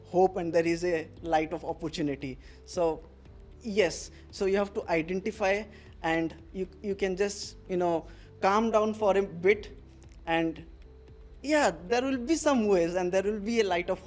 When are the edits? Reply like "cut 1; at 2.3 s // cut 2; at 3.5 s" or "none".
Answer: none